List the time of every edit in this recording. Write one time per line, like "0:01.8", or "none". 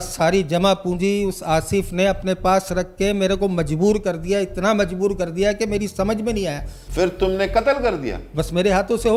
none